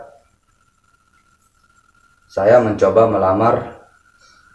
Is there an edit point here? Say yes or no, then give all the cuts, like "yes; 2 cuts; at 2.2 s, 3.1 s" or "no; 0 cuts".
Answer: no; 0 cuts